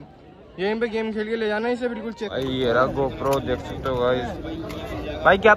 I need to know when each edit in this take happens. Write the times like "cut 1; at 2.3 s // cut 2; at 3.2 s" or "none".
cut 1; at 2.4 s